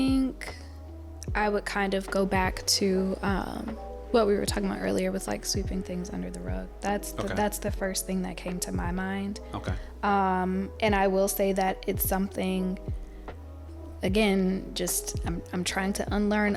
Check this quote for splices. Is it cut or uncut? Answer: uncut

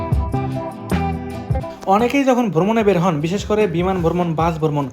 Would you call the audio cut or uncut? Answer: cut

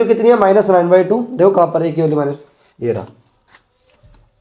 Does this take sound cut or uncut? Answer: uncut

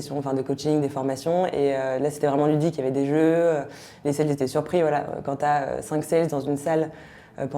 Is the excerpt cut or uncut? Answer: uncut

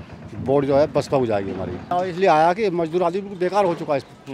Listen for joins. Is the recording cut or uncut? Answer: cut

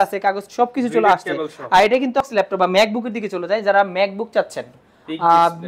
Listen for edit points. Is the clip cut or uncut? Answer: cut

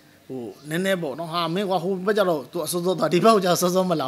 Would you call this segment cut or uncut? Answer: uncut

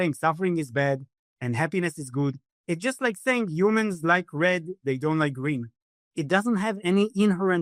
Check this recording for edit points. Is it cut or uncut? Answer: uncut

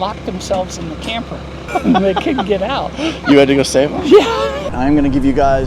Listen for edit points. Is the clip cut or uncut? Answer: cut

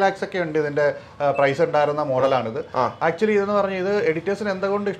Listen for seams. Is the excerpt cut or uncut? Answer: uncut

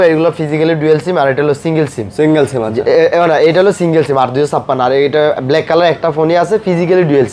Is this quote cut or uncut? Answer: uncut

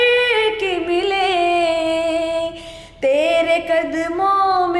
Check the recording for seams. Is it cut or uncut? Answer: uncut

